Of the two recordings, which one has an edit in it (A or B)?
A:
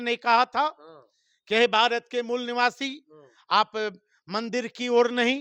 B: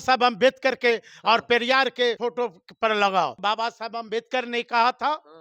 B